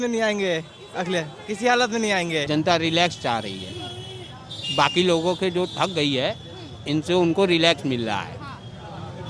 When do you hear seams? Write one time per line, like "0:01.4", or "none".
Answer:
0:02.5